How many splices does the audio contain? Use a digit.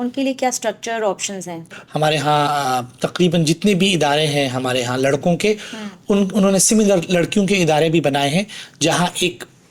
0